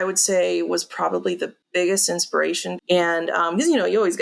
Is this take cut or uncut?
cut